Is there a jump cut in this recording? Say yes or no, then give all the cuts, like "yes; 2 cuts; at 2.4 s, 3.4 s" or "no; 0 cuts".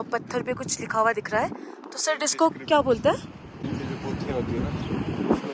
no; 0 cuts